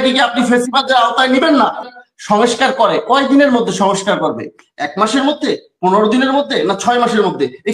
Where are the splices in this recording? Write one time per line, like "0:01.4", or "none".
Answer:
0:01.9